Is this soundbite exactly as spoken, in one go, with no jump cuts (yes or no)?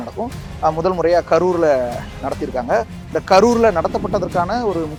yes